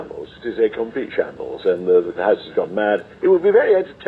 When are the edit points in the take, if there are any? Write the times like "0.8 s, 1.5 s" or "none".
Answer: 2.1 s, 3.1 s

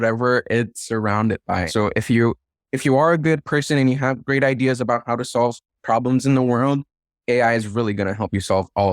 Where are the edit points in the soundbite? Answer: 1.6 s

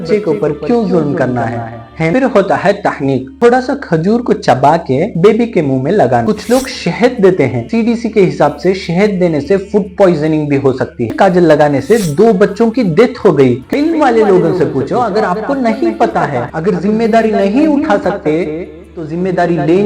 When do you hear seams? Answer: 2.1 s, 6.2 s, 11.1 s, 13.6 s, 16.5 s

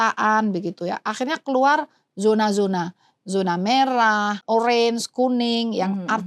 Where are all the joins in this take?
4.4 s

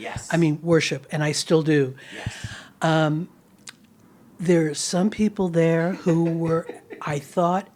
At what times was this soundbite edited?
none

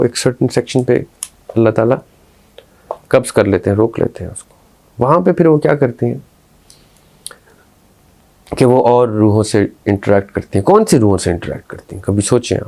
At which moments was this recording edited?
none

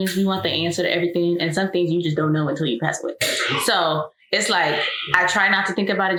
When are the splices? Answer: none

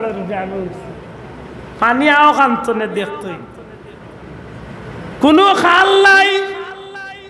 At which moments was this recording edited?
none

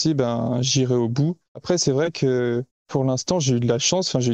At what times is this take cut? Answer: 1.6 s, 2.8 s

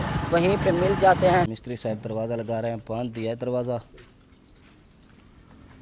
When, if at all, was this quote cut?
1.6 s

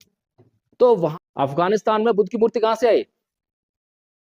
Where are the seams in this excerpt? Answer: 1.1 s

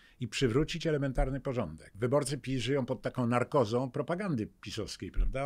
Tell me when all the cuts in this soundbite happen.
1.9 s

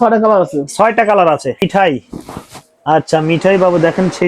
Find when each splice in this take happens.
1.6 s

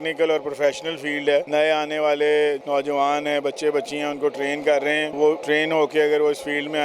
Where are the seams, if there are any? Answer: 1.5 s, 2.6 s, 5.3 s

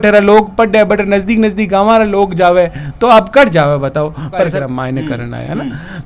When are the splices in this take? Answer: 4.5 s

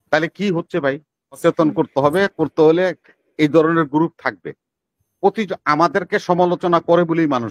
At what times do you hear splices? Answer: 1.4 s

